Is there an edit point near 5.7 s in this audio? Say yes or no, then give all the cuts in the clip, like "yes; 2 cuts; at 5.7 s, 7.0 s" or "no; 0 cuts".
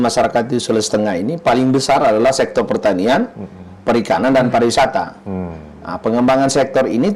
no; 0 cuts